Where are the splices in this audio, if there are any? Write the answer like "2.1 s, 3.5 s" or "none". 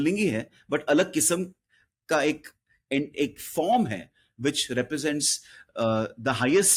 none